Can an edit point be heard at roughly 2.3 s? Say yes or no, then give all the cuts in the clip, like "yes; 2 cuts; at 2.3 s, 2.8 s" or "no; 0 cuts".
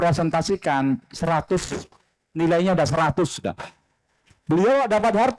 no; 0 cuts